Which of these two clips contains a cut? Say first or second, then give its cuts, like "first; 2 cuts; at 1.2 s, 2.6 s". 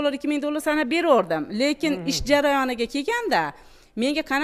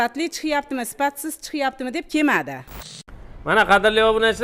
second; 1 cut; at 2.8 s